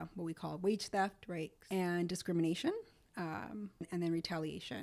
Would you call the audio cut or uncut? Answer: cut